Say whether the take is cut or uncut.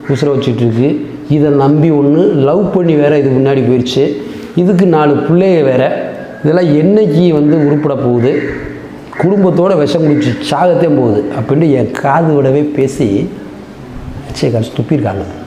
uncut